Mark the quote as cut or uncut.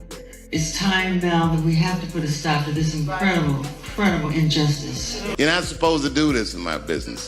cut